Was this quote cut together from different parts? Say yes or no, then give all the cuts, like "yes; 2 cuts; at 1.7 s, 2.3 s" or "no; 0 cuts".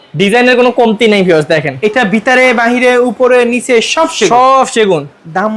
no; 0 cuts